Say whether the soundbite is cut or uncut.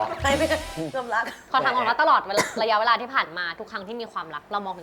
uncut